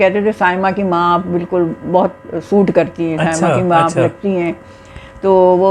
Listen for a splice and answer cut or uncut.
uncut